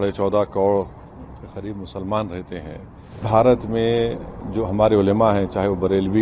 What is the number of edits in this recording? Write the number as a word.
one